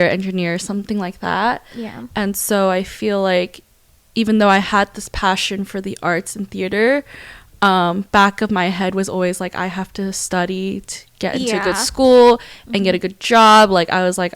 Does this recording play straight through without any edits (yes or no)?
yes